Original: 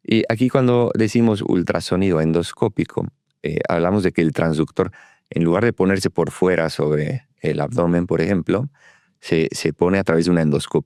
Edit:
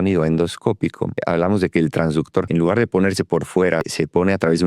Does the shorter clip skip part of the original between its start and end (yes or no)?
yes